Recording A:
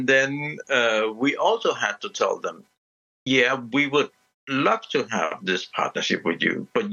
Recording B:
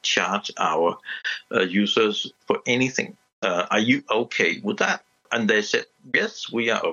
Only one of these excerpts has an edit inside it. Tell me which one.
B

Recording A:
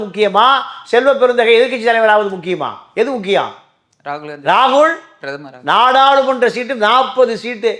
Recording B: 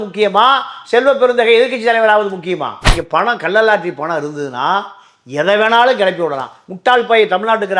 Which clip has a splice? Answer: B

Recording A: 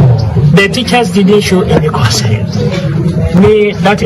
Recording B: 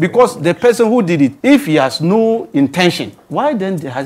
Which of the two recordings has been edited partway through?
B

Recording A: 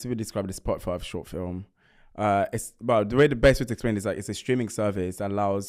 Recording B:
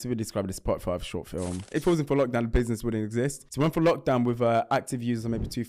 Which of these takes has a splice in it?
B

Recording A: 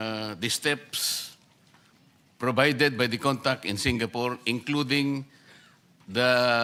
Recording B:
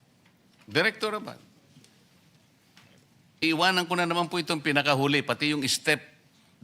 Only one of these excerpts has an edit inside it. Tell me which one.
B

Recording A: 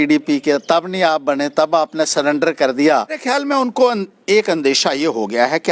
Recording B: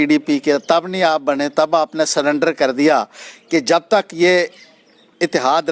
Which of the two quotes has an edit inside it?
A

